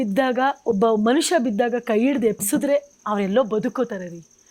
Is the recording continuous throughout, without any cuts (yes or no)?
yes